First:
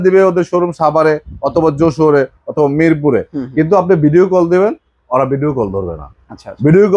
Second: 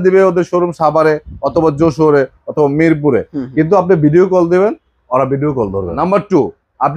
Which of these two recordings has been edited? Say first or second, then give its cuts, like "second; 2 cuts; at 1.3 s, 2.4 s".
second; 1 cut; at 5.9 s